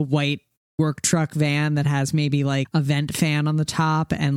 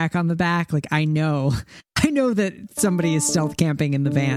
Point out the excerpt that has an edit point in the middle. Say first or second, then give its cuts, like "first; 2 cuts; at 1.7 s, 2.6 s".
first; 1 cut; at 2.7 s